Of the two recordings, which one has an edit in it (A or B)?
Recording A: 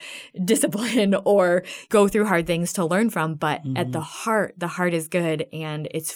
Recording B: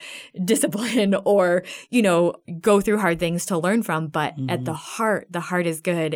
A